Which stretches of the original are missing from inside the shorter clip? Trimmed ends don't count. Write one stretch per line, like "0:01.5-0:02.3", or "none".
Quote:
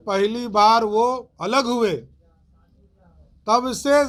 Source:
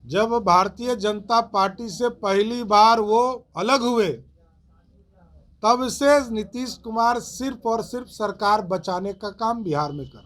none

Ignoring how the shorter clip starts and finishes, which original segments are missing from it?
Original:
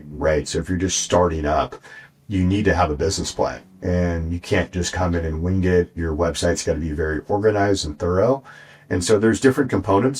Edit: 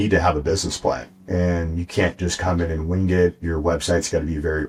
none

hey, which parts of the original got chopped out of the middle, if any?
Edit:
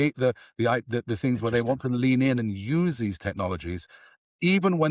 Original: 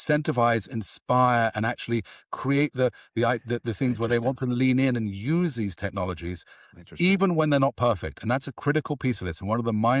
none

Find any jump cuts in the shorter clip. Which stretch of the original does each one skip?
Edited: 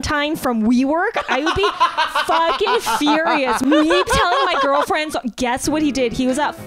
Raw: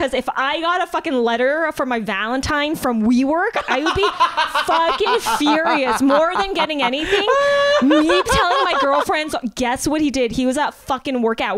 0:06.0-0:07.8

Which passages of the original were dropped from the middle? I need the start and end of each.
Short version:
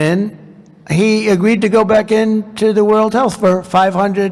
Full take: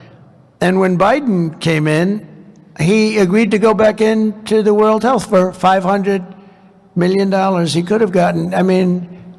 none

